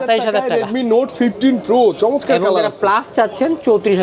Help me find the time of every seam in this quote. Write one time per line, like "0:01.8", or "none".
none